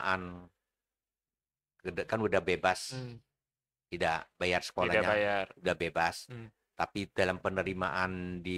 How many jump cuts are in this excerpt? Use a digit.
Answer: 0